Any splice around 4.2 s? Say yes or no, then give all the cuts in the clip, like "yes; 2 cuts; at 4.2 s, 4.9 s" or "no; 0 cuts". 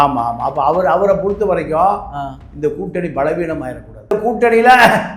yes; 1 cut; at 4.2 s